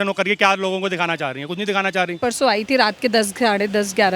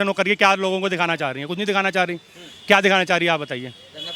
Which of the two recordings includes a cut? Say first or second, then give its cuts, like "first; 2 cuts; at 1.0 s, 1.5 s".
first; 1 cut; at 2.2 s